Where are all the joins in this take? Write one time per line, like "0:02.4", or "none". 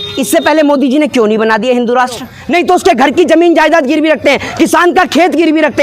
0:02.3